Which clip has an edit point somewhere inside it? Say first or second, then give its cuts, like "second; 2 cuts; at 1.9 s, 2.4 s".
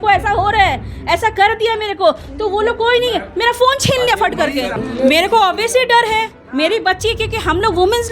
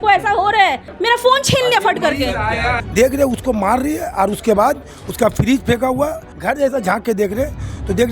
second; 3 cuts; at 0.9 s, 2.5 s, 6.3 s